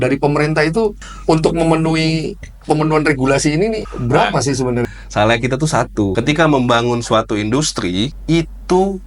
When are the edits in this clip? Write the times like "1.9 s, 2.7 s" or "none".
1.1 s, 3.9 s, 4.8 s, 6.1 s, 8.2 s